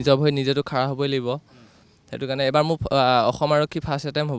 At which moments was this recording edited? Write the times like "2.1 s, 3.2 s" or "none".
none